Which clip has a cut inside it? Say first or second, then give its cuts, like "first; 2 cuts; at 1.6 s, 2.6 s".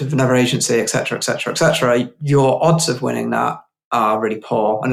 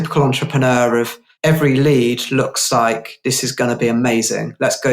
second; 1 cut; at 1.2 s